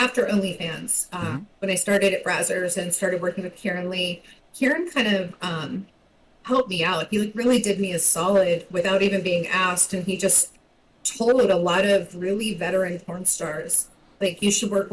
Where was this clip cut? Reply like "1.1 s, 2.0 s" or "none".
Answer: none